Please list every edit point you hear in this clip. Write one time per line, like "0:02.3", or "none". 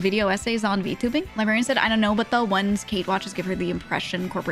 0:01.3